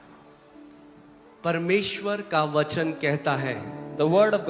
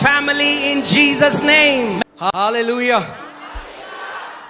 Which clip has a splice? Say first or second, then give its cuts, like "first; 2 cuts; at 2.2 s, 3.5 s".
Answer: second; 1 cut; at 2.0 s